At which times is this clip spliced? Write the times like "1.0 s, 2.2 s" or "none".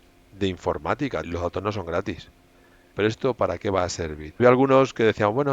1.3 s, 2.9 s, 4.4 s